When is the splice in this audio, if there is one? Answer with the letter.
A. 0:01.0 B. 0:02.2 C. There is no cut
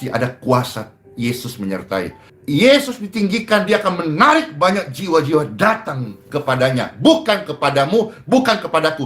B